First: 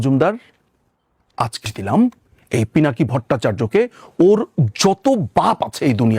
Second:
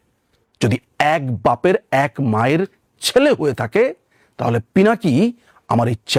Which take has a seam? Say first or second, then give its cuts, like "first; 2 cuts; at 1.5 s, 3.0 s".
first; 1 cut; at 1.6 s